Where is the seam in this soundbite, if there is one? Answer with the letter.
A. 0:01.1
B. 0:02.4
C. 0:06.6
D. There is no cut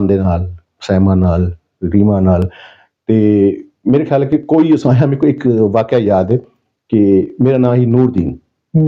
D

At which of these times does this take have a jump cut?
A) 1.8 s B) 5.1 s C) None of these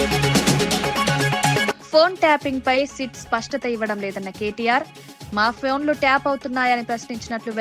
A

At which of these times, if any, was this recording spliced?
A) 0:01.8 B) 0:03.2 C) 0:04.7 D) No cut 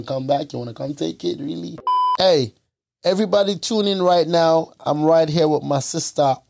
A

